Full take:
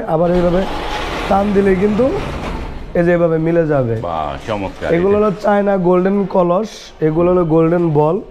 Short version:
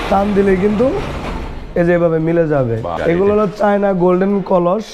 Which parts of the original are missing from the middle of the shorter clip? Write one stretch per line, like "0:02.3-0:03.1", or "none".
0:04.1-0:04.7